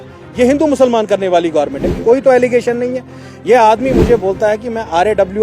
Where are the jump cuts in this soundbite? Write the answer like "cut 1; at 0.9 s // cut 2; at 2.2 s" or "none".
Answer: cut 1; at 1.9 s